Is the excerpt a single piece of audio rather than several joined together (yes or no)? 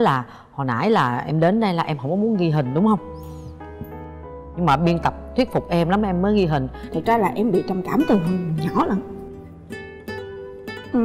no